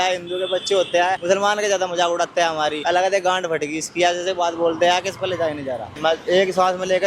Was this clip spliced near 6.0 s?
yes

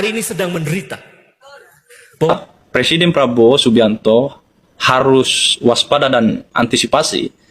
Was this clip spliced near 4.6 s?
no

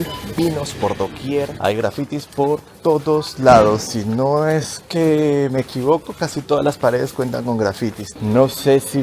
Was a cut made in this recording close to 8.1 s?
yes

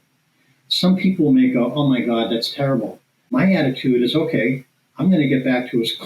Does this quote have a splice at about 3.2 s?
yes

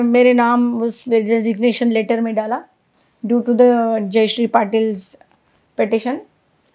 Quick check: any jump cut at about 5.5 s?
no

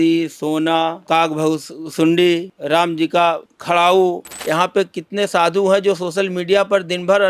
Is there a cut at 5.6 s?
no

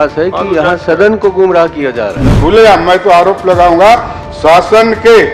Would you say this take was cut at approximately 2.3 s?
yes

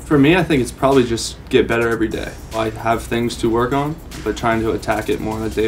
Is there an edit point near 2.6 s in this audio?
yes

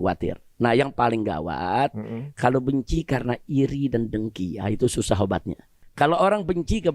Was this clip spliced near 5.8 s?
yes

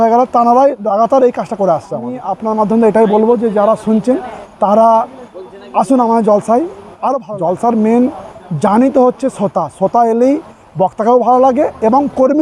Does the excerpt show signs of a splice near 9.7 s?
no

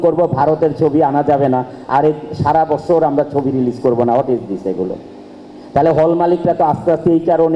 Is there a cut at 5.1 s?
no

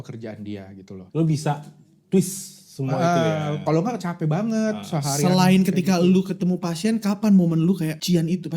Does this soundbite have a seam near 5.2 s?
no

